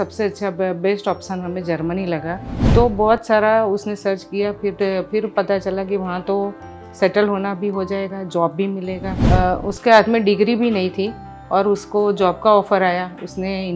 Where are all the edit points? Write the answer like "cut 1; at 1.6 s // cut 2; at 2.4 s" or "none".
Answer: cut 1; at 2.5 s // cut 2; at 9.1 s